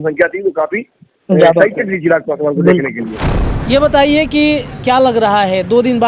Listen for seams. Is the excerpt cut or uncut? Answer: cut